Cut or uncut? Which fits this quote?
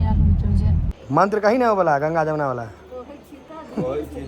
cut